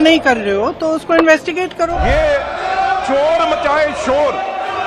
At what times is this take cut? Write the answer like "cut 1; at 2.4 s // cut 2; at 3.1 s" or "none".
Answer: cut 1; at 2.0 s